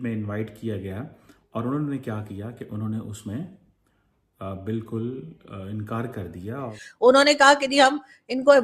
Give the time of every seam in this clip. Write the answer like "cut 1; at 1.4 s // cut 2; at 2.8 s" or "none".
cut 1; at 6.8 s